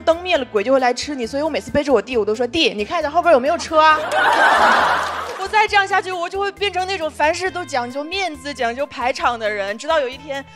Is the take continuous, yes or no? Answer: no